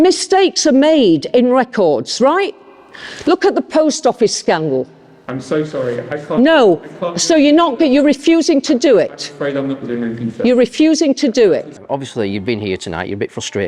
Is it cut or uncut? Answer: cut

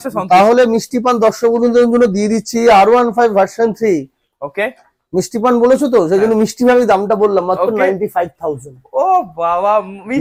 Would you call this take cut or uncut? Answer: uncut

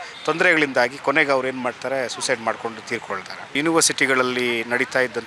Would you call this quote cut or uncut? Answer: cut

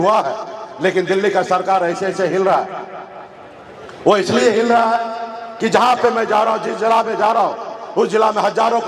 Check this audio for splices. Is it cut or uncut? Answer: uncut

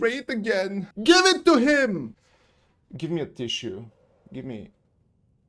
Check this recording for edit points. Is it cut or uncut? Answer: cut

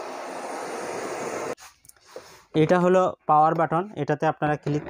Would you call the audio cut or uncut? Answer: cut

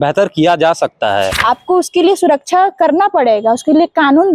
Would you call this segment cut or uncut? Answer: cut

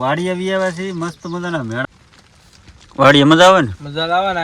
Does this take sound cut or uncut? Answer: cut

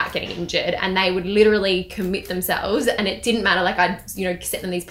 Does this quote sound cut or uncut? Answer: uncut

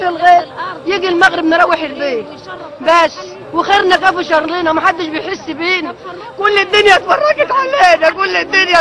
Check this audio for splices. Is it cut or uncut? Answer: uncut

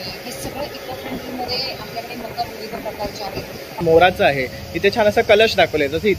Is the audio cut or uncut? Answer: cut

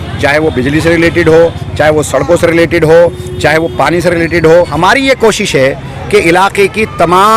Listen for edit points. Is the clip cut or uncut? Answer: cut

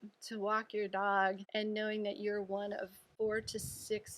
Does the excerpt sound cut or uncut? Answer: cut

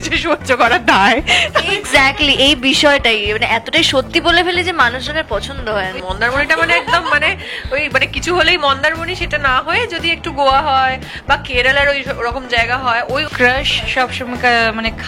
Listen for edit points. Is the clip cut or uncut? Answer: cut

